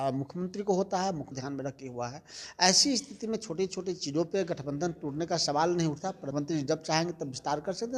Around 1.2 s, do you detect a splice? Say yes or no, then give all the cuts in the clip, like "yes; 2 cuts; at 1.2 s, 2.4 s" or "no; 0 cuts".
yes; 2 cuts; at 1.2 s, 6.2 s